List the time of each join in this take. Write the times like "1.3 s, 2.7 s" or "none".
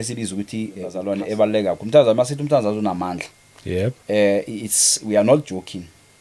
0.9 s

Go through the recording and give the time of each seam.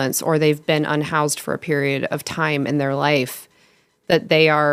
none

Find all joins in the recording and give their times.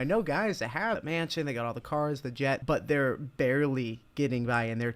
1.0 s, 2.6 s

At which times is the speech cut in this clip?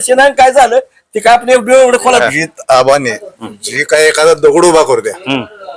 2.2 s

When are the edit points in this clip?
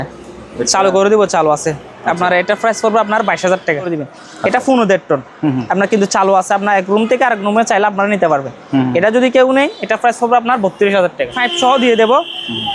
3.9 s, 11.4 s

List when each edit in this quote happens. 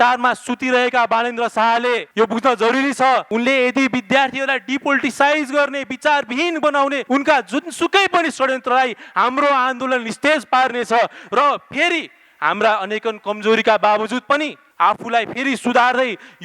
2.1 s, 3.3 s, 7.0 s, 14.6 s

